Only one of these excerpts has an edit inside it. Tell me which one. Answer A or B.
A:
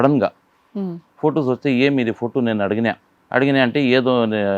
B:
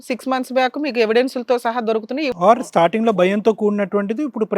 B